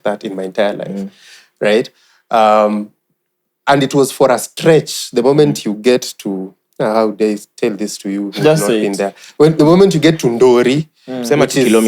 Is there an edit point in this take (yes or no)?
no